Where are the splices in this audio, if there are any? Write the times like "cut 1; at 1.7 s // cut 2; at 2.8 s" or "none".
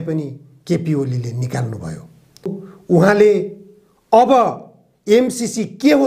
cut 1; at 2.7 s